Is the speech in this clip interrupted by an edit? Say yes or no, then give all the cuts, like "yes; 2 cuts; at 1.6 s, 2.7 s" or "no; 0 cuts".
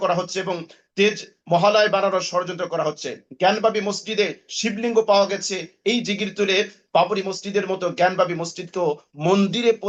no; 0 cuts